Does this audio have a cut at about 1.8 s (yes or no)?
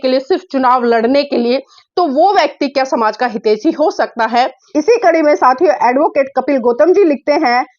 no